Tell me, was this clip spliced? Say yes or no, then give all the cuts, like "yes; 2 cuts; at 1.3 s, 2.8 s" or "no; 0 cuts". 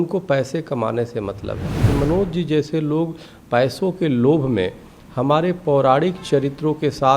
yes; 1 cut; at 1.8 s